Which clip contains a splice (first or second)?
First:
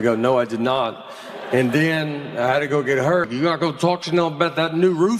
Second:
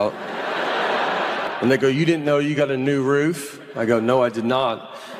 first